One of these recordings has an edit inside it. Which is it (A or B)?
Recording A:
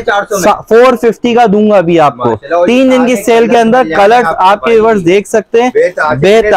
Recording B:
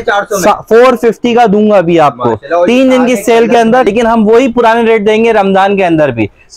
B